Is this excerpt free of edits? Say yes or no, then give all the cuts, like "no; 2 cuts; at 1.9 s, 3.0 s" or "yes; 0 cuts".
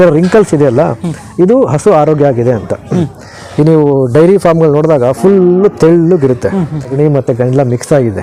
no; 1 cut; at 6.9 s